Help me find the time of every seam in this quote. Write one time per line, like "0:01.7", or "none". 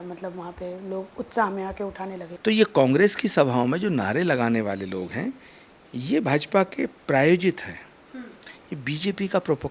0:02.2